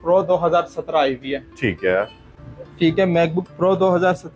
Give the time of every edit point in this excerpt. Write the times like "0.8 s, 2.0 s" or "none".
none